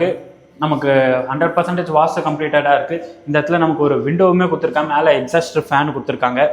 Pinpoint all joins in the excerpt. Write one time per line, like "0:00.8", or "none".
none